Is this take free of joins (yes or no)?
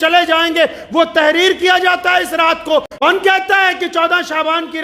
no